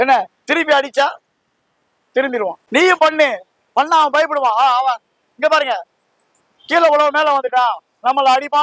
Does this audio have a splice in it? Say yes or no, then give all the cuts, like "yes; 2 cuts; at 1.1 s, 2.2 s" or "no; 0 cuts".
no; 0 cuts